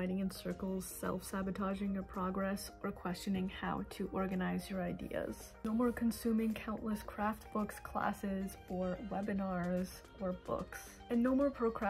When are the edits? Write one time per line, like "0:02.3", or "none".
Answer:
none